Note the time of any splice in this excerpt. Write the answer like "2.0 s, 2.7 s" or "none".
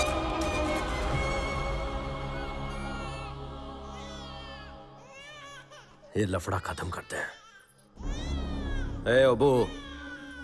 none